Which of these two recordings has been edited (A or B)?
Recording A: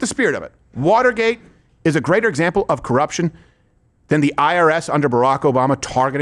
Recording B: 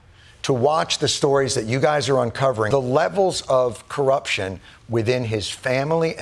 B